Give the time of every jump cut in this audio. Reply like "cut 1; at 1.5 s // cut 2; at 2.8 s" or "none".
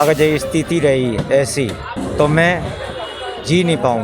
cut 1; at 1.9 s